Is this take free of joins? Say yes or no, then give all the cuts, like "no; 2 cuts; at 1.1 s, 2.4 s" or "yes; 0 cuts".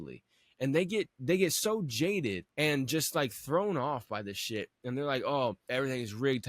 no; 2 cuts; at 2.4 s, 5.6 s